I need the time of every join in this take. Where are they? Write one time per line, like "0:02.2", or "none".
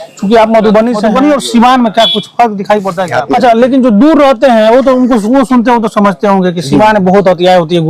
0:01.1
0:03.0